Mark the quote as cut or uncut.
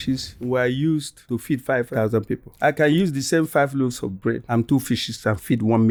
uncut